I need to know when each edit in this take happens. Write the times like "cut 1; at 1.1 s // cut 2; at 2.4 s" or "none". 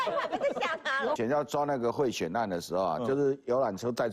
cut 1; at 1.2 s